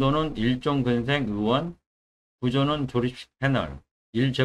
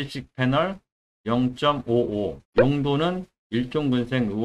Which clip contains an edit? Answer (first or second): second